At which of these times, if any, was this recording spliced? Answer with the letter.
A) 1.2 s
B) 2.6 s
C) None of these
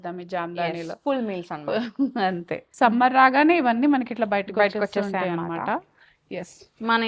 B